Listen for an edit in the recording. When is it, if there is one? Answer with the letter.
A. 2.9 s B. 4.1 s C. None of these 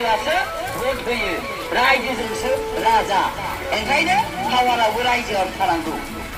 C